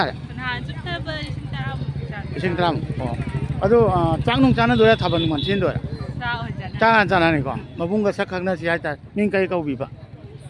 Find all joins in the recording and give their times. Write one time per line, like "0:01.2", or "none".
0:07.7